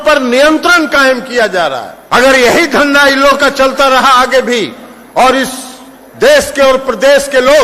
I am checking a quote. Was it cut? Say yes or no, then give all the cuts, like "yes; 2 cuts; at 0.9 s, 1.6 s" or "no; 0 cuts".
yes; 1 cut; at 1.9 s